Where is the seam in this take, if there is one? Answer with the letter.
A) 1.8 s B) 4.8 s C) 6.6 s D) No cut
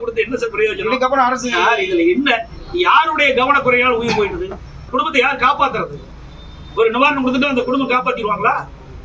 B